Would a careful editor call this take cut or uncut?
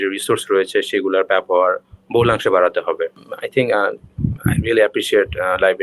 cut